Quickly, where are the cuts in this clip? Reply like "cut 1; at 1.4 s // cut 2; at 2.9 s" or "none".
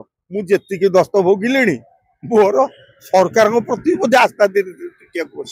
none